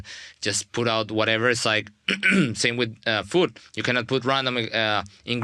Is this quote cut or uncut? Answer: uncut